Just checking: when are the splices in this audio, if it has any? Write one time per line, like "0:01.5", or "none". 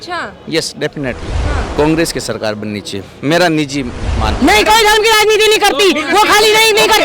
0:01.7
0:04.3

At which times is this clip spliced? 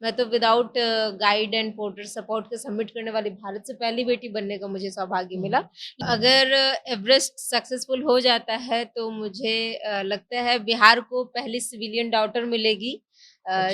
0:06.0

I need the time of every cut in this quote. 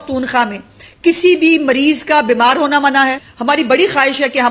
0:03.3

